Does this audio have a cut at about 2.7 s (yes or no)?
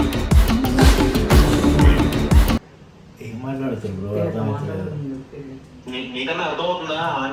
no